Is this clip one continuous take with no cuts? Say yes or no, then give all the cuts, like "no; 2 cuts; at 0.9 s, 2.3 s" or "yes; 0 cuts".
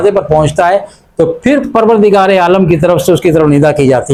yes; 0 cuts